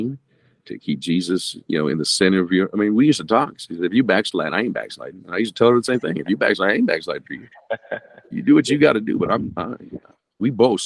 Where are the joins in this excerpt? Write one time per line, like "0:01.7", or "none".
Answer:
none